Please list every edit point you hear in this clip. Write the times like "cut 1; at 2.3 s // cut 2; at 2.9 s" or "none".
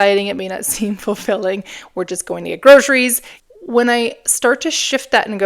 cut 1; at 3.3 s